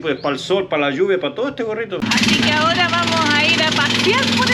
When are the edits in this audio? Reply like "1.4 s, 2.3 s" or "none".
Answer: 2.0 s